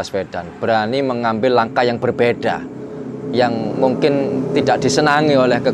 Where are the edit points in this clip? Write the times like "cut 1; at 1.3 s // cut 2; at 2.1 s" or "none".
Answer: none